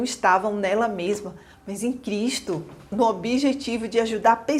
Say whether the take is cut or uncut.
uncut